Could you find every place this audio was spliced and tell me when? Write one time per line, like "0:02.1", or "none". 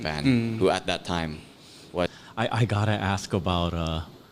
0:02.1